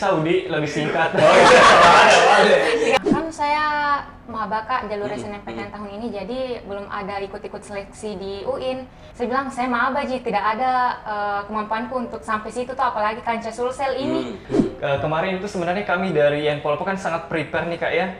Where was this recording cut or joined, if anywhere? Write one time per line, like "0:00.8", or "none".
0:03.0
0:09.0
0:14.4